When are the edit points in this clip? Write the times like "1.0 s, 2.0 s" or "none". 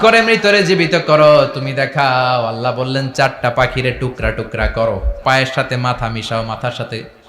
5.1 s